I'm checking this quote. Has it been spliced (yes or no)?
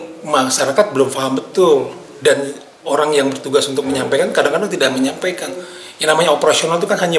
no